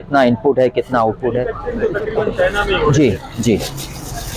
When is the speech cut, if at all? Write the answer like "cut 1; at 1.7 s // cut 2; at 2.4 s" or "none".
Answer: cut 1; at 1.6 s